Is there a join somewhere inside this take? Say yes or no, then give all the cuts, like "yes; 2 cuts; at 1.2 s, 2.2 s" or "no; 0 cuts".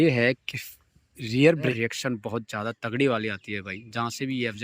yes; 1 cut; at 1.7 s